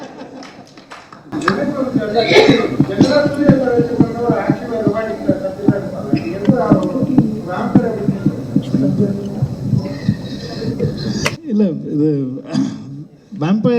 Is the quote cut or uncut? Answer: uncut